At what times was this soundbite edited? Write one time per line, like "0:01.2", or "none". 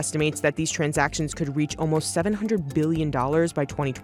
none